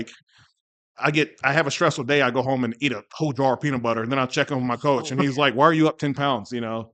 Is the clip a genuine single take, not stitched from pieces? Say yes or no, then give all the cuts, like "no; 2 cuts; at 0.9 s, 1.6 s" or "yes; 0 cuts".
yes; 0 cuts